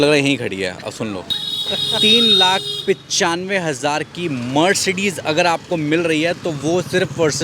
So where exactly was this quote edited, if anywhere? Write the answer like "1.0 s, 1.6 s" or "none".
1.3 s